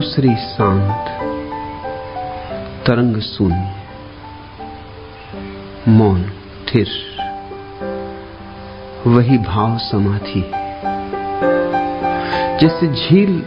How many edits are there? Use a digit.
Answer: 2